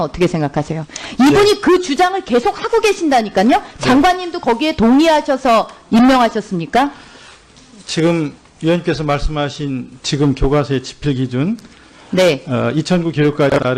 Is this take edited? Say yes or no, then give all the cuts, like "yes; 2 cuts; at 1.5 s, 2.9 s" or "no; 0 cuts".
yes; 1 cut; at 3.6 s